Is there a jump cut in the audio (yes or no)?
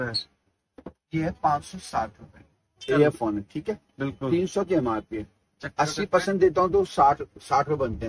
yes